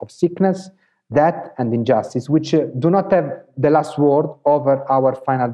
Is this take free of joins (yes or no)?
no